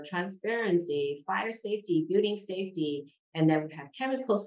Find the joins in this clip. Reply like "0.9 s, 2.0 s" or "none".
none